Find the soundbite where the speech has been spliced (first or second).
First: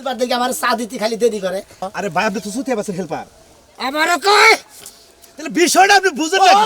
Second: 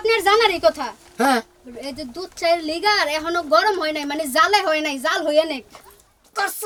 first